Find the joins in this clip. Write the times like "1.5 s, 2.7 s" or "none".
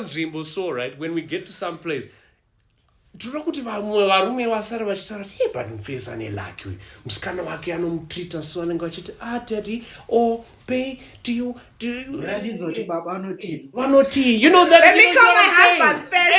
none